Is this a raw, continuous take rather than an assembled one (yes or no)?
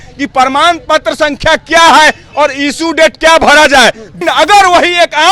no